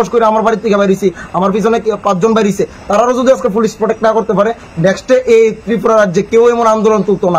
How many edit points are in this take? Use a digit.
0